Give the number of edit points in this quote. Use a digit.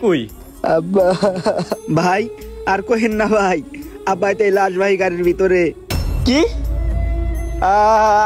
0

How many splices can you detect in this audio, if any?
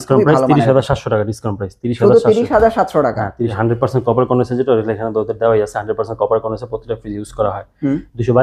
1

